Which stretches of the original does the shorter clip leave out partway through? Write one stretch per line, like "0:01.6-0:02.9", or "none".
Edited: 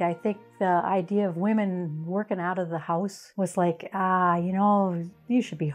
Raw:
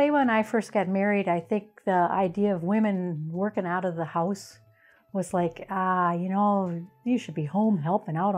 0:04.5-0:05.0

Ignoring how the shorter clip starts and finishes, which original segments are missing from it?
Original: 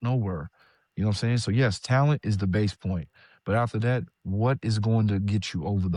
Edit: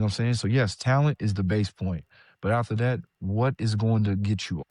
none

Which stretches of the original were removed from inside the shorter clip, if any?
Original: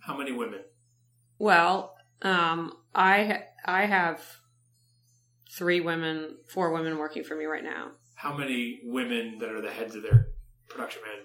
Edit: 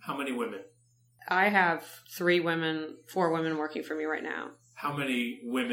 0:01.2-0:03.5
0:04.3-0:05.4

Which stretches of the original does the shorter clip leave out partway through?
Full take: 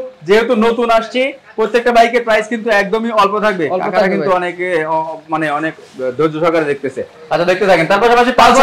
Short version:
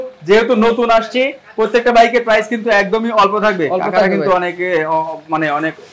none

